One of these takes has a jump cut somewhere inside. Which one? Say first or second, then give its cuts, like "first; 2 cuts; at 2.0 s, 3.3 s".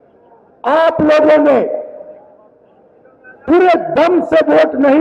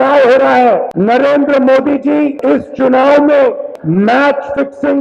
second; 3 cuts; at 0.9 s, 2.4 s, 3.7 s